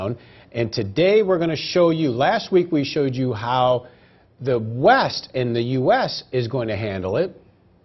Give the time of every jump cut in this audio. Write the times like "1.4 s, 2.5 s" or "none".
1.0 s